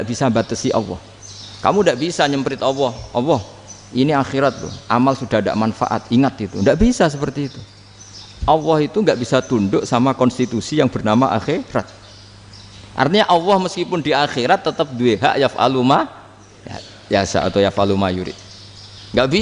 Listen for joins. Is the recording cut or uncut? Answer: uncut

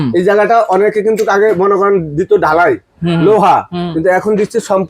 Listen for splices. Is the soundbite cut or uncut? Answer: uncut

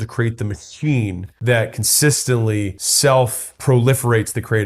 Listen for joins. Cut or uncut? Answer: cut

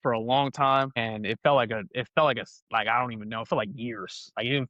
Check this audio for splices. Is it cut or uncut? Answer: uncut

